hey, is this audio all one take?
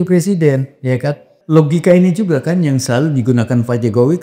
no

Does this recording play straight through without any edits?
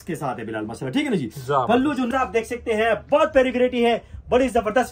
no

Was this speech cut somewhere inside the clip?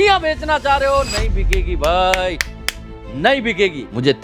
no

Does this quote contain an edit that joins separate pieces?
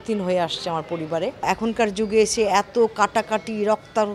yes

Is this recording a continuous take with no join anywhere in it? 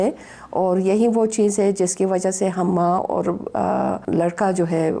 no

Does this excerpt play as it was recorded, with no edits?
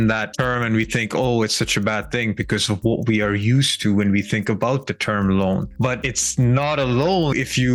yes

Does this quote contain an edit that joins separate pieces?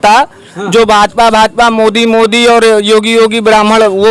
no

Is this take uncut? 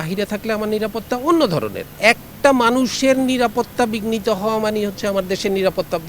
no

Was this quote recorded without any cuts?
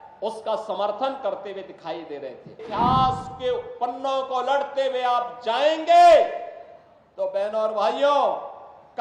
no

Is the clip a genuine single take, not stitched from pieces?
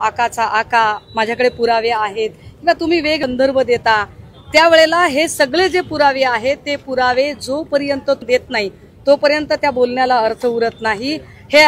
yes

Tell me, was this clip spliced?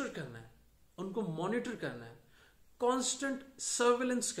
no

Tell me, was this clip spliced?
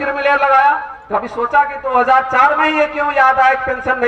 yes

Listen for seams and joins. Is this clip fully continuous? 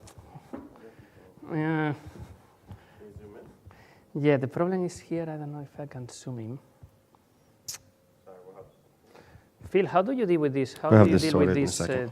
no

